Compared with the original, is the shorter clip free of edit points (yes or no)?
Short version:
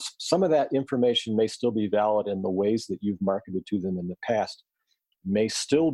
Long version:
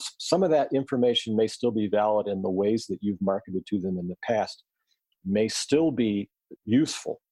yes